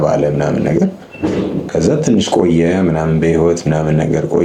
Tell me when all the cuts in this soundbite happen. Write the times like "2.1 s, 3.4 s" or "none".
none